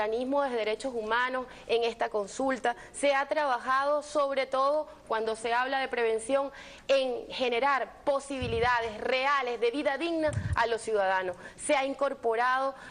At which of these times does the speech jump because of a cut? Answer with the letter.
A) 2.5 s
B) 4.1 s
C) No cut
C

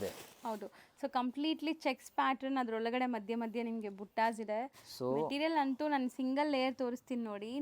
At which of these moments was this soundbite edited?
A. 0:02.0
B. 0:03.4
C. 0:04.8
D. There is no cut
C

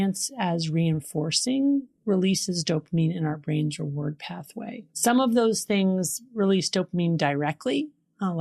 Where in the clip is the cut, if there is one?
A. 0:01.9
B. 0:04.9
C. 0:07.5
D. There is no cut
B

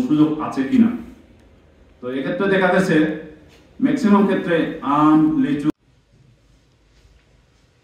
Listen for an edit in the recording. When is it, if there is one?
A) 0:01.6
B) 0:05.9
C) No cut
B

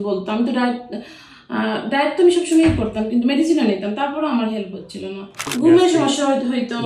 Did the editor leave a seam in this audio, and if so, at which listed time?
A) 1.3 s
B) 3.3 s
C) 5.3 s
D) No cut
C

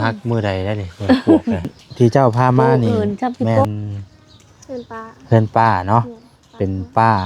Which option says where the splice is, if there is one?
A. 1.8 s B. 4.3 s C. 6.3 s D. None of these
A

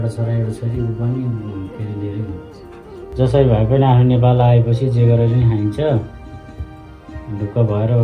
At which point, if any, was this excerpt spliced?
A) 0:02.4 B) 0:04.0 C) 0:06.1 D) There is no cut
A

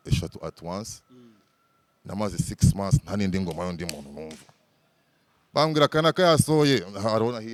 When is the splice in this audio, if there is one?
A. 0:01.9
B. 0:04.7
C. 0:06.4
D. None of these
D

